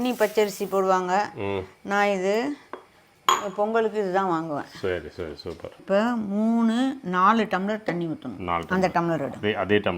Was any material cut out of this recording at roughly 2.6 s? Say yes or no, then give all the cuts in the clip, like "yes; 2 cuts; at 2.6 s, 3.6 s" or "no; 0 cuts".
no; 0 cuts